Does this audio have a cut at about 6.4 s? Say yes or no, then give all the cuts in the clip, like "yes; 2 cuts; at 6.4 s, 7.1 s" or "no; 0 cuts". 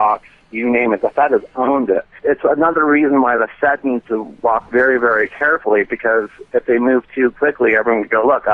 no; 1 cut; at 2.1 s